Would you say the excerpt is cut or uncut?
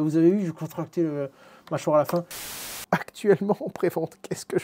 cut